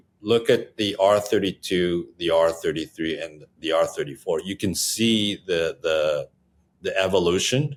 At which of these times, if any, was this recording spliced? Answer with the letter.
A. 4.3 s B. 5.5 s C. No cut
C